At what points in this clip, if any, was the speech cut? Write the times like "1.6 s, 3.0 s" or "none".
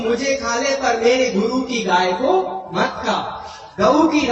none